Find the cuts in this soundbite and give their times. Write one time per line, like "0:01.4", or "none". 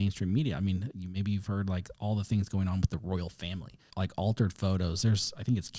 0:03.9